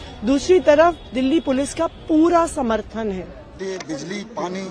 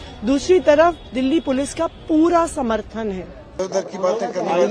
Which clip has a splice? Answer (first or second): second